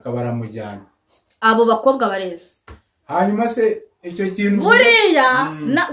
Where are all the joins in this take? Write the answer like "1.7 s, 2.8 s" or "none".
none